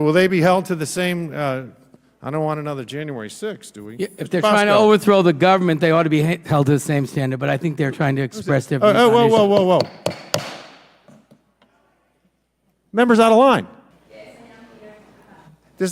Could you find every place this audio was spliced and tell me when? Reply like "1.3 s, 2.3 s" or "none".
14.0 s